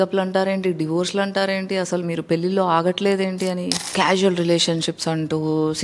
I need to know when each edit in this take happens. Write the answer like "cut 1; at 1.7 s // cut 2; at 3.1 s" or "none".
cut 1; at 3.9 s